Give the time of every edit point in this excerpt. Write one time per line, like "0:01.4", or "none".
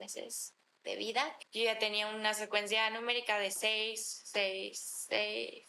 0:01.4